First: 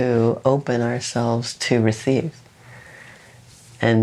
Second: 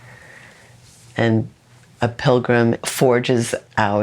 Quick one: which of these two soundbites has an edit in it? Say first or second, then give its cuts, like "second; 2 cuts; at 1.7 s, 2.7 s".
second; 1 cut; at 2.8 s